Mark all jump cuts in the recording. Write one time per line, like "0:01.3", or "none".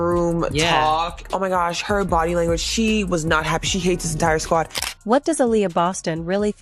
0:01.3
0:05.0